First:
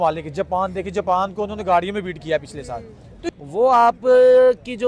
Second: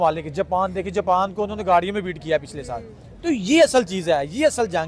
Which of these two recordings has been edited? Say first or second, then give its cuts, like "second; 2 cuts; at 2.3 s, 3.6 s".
first; 1 cut; at 3.1 s